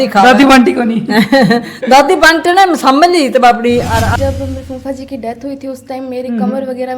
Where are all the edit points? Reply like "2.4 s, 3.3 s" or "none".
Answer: 4.1 s